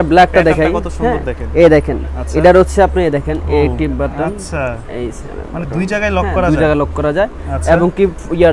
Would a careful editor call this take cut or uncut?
uncut